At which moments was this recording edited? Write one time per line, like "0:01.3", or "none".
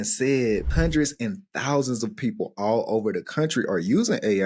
none